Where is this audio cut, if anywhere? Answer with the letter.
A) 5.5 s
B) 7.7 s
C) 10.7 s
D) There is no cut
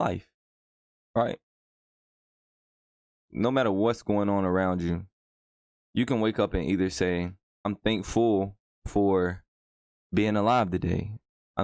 B